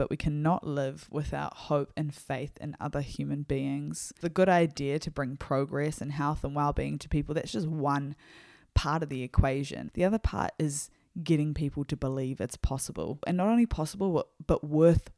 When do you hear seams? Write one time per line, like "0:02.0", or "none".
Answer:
0:04.1
0:09.8
0:13.2